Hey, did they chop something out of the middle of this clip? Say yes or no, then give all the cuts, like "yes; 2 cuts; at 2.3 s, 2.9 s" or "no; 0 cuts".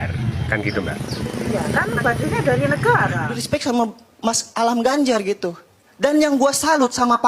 yes; 1 cut; at 3.3 s